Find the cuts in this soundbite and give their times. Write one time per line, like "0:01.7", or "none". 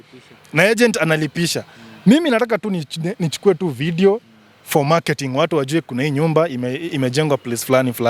none